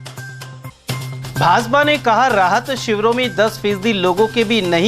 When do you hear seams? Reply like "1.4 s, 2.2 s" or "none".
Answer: 1.1 s